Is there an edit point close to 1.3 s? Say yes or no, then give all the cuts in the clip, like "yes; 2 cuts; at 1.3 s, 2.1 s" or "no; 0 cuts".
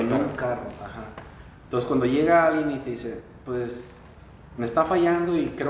no; 0 cuts